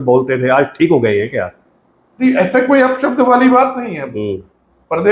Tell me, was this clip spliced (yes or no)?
no